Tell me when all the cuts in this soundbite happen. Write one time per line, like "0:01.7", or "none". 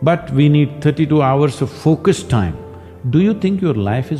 none